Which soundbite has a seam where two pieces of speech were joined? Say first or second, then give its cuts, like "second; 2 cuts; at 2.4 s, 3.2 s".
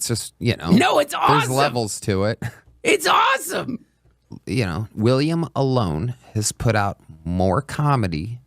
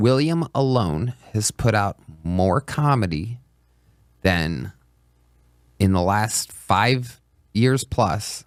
first; 1 cut; at 3.9 s